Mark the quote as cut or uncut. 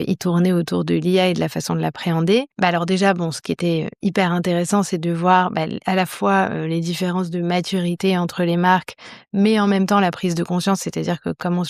cut